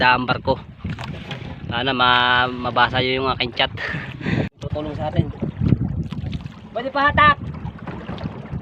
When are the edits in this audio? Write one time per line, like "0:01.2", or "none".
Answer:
0:04.5